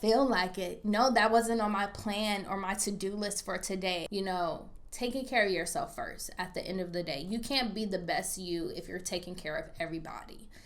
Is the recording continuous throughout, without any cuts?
no; 1 cut; at 4.1 s

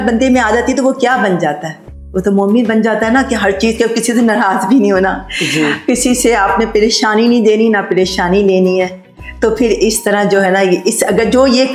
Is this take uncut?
yes; 0 cuts

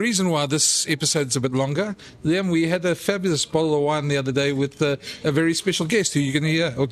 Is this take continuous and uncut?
yes; 0 cuts

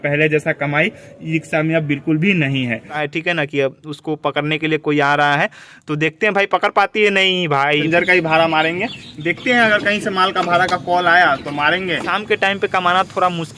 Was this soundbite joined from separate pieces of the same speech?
yes; 3 cuts; at 3.0 s, 7.8 s, 12.1 s

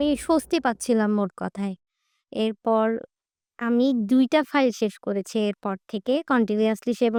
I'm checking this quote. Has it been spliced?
no; 0 cuts

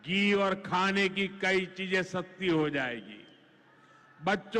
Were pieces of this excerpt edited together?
no; 0 cuts

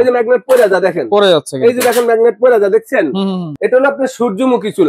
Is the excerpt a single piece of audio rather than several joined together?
no; 1 cut; at 3.5 s

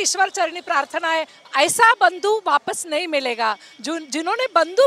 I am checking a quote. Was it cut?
yes; 1 cut; at 1.4 s

